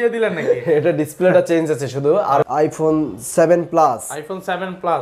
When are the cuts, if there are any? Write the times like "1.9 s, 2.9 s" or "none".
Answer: 2.5 s